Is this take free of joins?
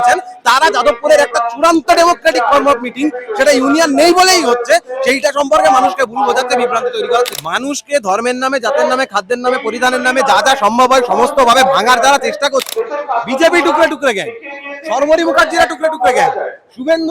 no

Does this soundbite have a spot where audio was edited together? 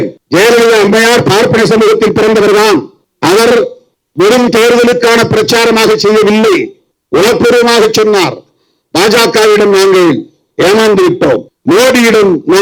no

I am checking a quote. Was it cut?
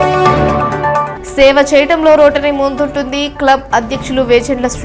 yes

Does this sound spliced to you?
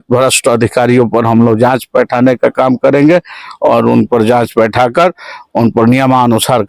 no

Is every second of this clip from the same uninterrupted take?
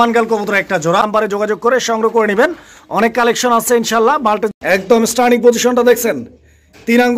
no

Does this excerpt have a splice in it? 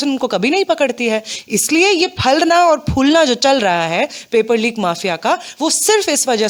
no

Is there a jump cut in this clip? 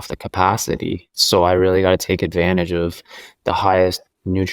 yes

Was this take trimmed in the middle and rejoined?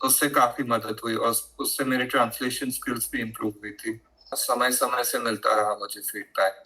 yes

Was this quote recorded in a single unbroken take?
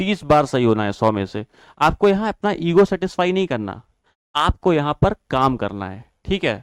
yes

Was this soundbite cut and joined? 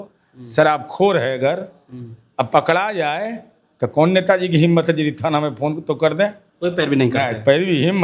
yes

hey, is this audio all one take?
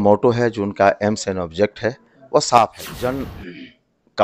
no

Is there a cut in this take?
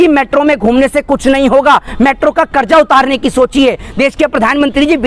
no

